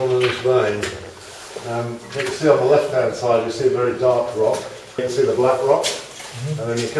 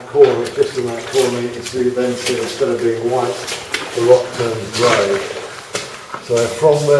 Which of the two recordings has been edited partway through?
first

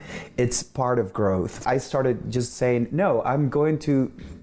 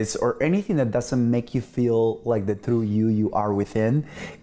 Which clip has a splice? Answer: first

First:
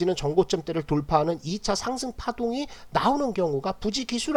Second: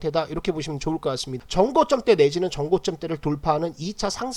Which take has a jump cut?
second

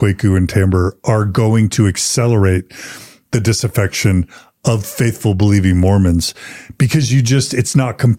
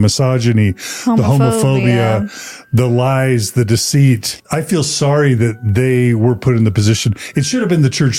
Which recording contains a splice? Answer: second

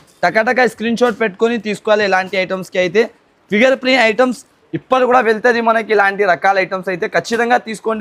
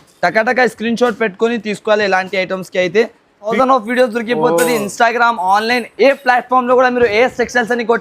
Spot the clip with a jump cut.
second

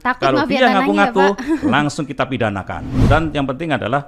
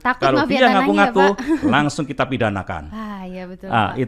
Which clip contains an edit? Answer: first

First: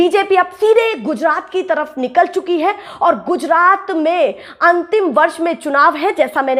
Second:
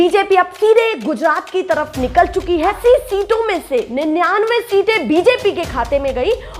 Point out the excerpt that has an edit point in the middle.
second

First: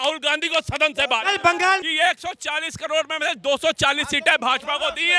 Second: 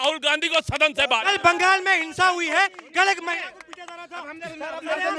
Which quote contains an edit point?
first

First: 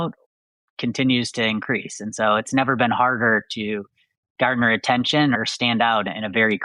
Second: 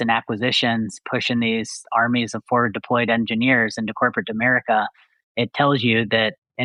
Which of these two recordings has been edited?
first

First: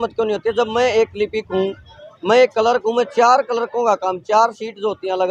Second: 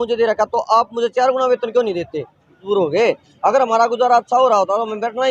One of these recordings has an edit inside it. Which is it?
second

